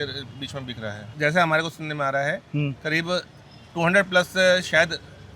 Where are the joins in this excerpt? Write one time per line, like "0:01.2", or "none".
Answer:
0:01.0